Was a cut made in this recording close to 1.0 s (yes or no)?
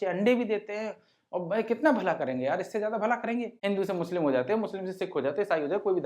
no